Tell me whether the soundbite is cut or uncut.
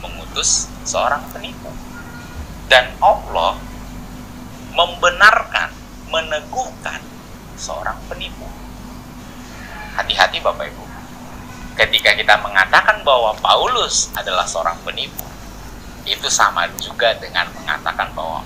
uncut